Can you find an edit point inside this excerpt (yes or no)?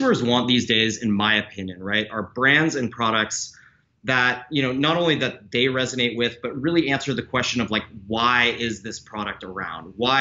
no